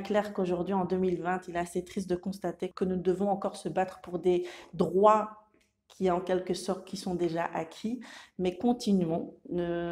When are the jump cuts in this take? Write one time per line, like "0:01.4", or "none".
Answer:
0:02.7